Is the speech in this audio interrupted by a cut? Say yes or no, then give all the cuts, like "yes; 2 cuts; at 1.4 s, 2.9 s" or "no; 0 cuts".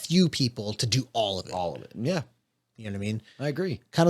no; 0 cuts